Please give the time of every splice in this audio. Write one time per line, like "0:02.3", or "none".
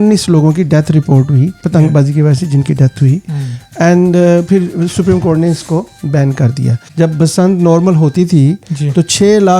0:01.6
0:06.8